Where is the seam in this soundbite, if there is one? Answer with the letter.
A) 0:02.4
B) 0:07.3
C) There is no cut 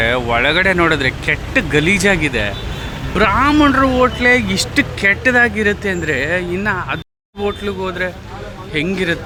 C